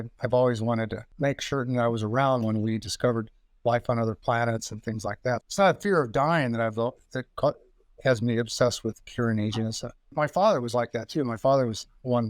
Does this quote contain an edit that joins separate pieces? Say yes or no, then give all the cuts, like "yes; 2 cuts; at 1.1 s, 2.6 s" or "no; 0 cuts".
yes; 3 cuts; at 1.0 s, 5.4 s, 10.1 s